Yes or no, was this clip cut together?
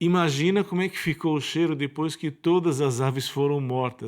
no